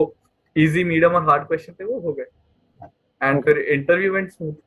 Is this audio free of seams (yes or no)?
yes